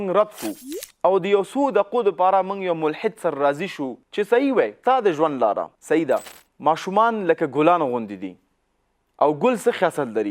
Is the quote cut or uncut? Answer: cut